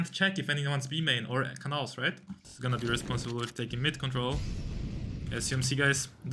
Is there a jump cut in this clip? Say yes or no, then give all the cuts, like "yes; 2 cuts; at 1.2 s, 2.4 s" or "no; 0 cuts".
yes; 1 cut; at 2.5 s